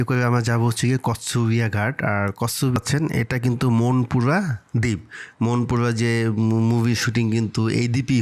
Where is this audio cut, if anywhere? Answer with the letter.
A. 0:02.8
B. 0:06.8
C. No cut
A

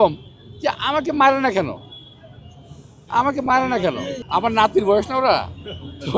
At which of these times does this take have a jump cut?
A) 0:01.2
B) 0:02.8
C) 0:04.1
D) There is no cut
C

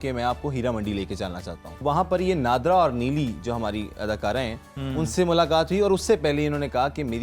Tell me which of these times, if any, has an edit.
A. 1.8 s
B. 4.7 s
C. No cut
A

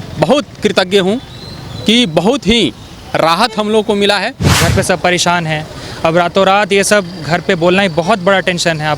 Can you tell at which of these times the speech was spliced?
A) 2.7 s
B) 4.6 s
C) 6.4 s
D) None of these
B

